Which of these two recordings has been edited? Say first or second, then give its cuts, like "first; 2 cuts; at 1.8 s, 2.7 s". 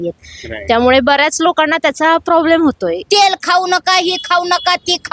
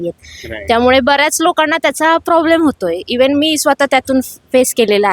first; 1 cut; at 3.0 s